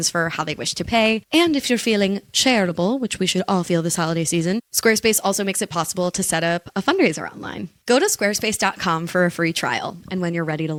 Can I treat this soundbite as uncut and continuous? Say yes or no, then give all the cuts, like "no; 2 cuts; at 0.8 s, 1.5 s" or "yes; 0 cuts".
yes; 0 cuts